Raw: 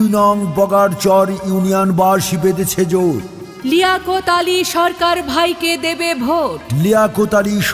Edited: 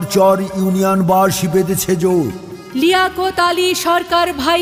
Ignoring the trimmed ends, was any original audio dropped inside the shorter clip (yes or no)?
no